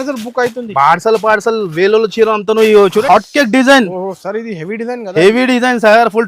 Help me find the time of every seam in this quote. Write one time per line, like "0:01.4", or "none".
0:03.0